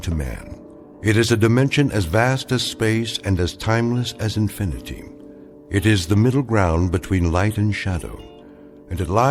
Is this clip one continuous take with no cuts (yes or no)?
yes